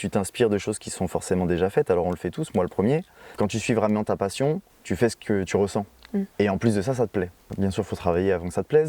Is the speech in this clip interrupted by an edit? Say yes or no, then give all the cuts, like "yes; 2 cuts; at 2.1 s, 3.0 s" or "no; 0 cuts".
yes; 4 cuts; at 3.2 s, 4.7 s, 6.3 s, 7.4 s